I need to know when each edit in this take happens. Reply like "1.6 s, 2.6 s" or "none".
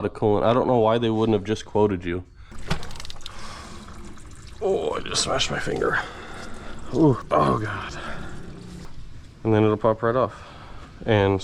2.5 s, 7.2 s, 8.9 s